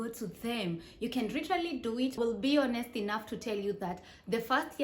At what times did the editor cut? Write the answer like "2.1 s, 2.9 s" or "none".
2.2 s